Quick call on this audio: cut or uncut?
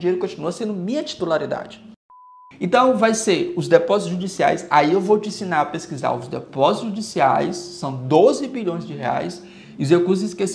cut